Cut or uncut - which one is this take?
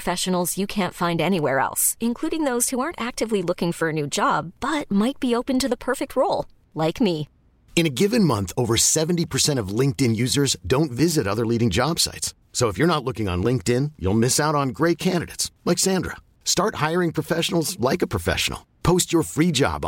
uncut